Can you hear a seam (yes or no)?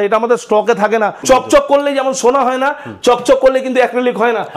yes